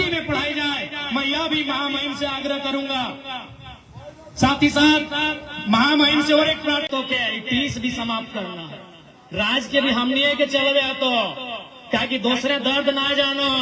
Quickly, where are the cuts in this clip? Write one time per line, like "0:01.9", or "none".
0:06.9